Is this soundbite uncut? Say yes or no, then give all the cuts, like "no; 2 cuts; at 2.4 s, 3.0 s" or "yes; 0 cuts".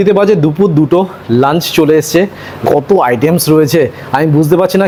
yes; 0 cuts